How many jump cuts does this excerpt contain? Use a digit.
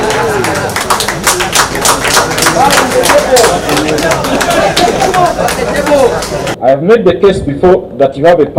1